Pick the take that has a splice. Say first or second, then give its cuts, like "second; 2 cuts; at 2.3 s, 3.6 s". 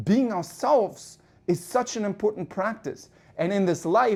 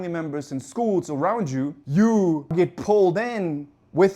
second; 2 cuts; at 1.8 s, 2.5 s